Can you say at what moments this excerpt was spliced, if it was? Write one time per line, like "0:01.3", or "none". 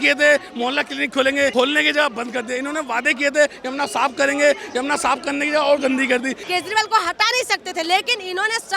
0:01.5
0:06.4